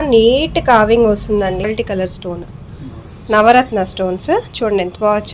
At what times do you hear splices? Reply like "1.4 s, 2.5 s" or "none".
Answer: 1.6 s